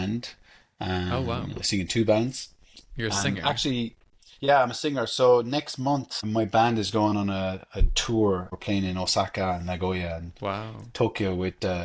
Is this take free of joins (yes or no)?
no